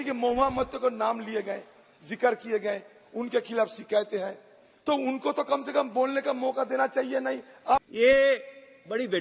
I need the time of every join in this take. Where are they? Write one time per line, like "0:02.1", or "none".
0:07.9